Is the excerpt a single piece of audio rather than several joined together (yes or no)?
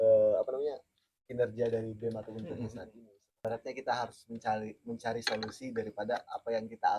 no